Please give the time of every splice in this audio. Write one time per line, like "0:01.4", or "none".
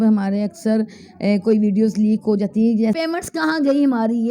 0:02.9